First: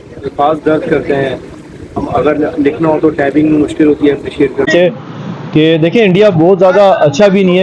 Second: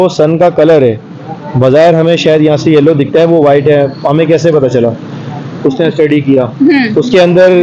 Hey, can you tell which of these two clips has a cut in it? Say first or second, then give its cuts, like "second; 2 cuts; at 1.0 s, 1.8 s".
first; 1 cut; at 4.7 s